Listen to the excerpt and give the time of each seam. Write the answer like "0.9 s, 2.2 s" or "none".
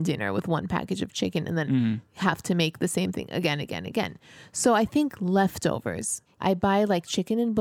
6.4 s